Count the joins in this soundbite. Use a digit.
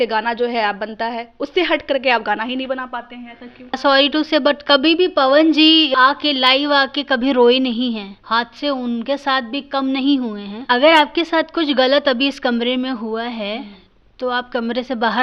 3